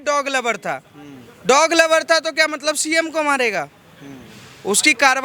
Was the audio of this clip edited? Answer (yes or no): no